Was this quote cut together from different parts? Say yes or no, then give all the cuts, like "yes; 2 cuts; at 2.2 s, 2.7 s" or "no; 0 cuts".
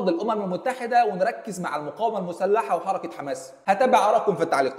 yes; 1 cut; at 3.5 s